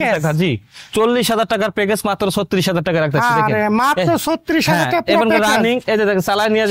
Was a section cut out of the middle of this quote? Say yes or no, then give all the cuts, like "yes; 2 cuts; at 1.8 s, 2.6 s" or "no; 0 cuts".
no; 0 cuts